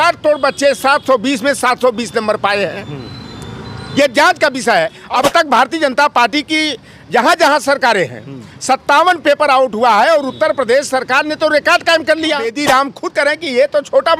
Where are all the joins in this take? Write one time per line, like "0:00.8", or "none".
0:05.0
0:12.6